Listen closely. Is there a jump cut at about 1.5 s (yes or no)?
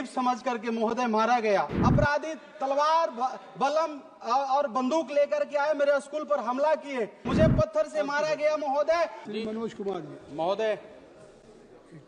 yes